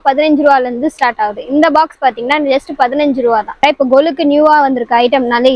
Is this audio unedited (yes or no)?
no